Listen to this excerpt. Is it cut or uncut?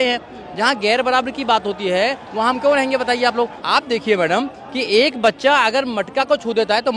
cut